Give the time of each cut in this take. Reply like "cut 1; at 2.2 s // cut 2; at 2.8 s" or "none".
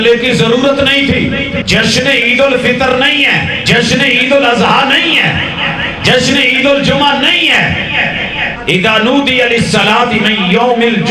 cut 1; at 1.6 s // cut 2; at 3.5 s // cut 3; at 8.5 s

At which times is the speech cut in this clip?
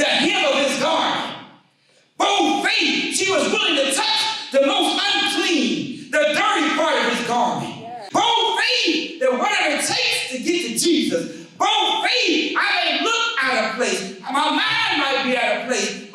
cut 1; at 8.0 s

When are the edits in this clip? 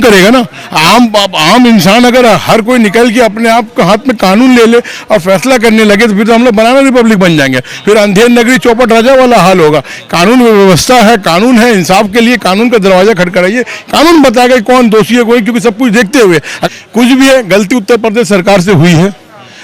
cut 1; at 16.6 s

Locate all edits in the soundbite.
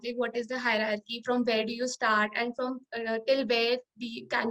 none

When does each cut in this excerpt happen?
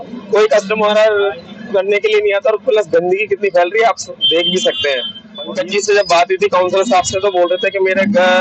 cut 1; at 5.5 s

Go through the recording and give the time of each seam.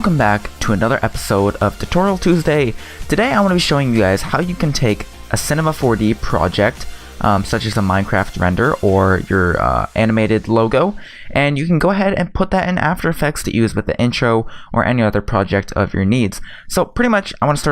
cut 1; at 7.8 s

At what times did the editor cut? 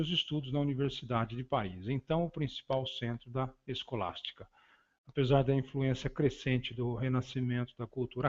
cut 1; at 1.0 s

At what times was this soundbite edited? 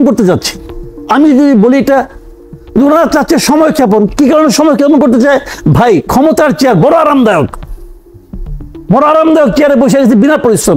none

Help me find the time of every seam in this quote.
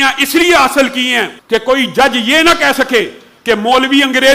cut 1; at 1.3 s

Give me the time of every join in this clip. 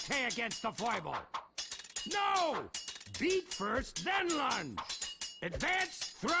cut 1; at 0.9 s

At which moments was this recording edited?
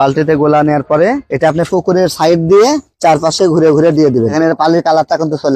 cut 1; at 4.3 s

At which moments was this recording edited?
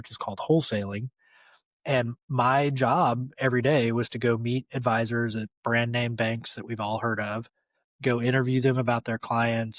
cut 1; at 1.1 s

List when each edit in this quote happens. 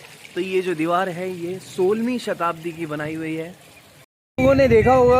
cut 1; at 4.2 s

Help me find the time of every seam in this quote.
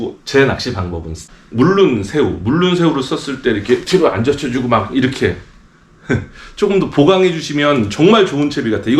cut 1; at 1.2 s

